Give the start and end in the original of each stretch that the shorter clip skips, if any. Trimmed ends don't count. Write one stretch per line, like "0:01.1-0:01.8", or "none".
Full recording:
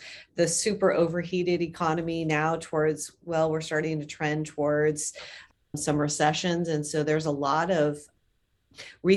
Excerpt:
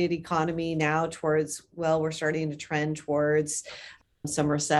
none